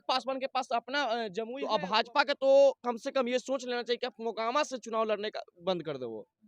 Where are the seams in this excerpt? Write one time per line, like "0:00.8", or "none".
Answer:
0:01.6